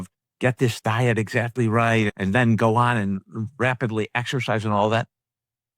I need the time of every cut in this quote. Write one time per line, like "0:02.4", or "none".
0:02.1